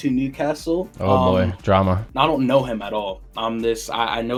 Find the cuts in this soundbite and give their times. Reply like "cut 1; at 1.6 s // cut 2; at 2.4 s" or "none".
none